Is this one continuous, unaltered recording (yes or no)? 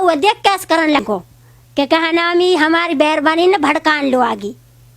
no